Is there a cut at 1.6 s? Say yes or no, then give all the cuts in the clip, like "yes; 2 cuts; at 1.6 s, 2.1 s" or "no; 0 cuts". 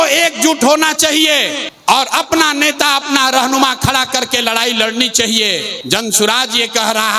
yes; 2 cuts; at 1.6 s, 5.7 s